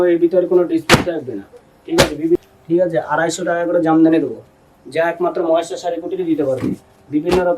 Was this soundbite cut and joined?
yes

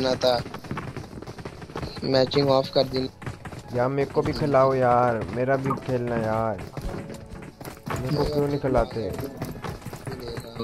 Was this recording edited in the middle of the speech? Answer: no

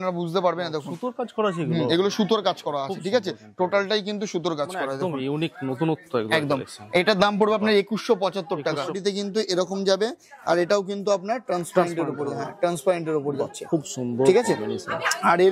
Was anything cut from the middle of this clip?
yes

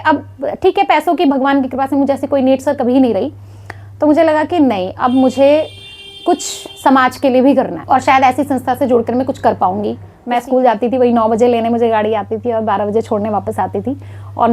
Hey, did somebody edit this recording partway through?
yes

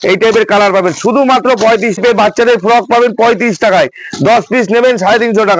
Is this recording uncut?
no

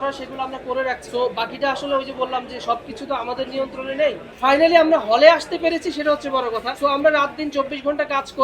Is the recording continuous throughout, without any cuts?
no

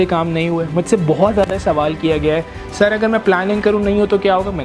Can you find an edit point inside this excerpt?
no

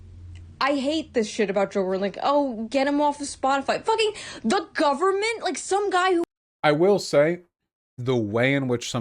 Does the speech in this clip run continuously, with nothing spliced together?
yes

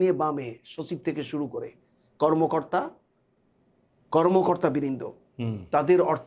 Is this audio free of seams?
yes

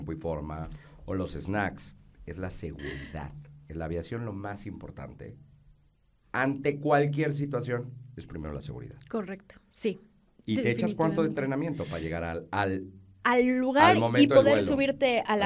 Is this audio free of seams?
yes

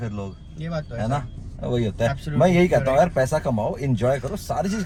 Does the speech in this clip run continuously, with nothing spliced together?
yes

